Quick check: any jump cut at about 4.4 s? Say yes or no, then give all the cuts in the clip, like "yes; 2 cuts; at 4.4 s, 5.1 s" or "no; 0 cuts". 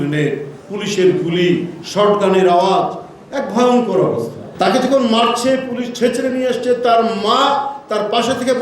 yes; 1 cut; at 4.4 s